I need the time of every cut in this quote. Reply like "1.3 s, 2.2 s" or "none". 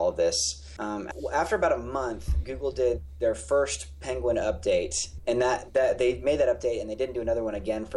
1.0 s, 5.1 s